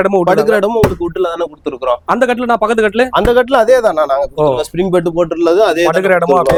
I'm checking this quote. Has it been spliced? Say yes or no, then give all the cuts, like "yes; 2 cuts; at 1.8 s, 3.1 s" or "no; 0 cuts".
no; 0 cuts